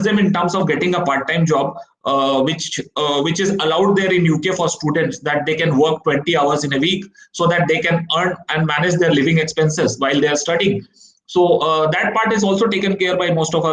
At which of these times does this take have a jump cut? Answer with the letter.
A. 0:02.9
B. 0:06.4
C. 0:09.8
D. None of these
D